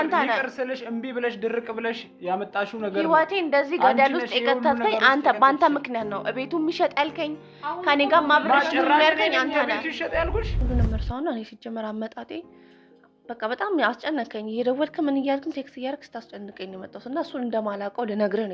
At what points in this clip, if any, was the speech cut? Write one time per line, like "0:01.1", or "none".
0:10.6